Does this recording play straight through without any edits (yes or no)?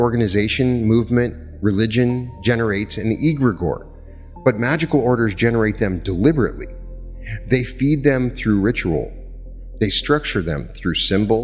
yes